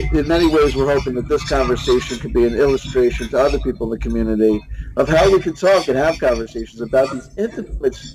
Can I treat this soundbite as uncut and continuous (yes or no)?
no